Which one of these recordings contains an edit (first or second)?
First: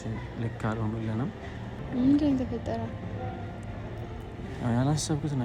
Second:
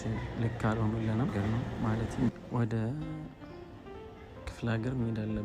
second